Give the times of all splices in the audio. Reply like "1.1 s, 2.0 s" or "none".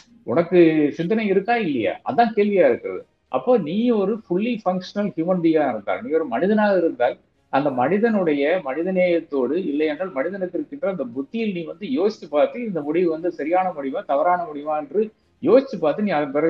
none